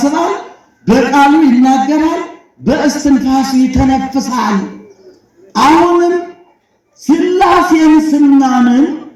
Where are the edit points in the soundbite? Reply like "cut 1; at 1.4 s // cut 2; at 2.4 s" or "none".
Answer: none

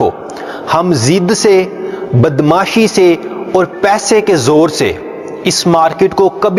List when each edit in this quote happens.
none

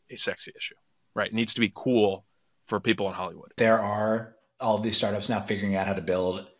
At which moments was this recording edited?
cut 1; at 3.5 s

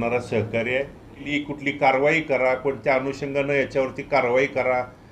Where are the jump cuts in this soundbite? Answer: cut 1; at 1.2 s

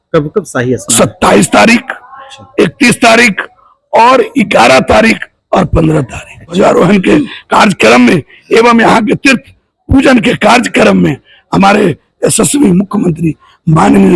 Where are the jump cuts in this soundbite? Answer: cut 1; at 6.5 s

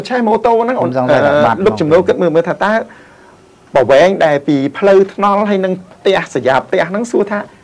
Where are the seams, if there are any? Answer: none

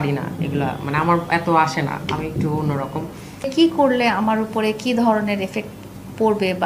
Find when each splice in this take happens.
cut 1; at 3.5 s

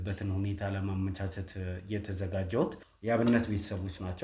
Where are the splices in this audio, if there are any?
cut 1; at 2.9 s

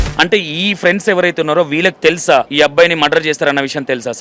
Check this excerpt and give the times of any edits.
cut 1; at 2.5 s

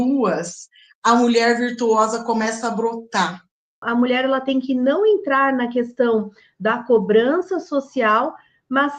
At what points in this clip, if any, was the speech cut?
cut 1; at 3.8 s

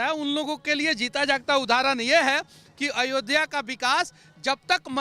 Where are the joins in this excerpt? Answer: none

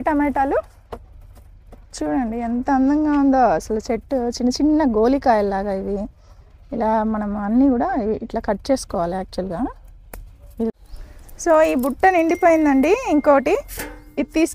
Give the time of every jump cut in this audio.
cut 1; at 10.7 s

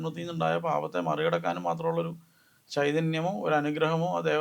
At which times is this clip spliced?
none

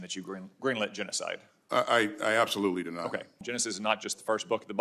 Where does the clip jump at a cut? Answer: cut 1; at 3.4 s

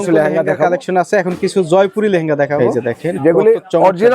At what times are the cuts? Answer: cut 1; at 2.6 s

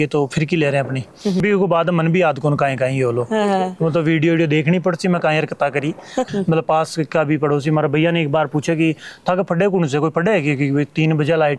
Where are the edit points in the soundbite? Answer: cut 1; at 1.4 s // cut 2; at 6.3 s

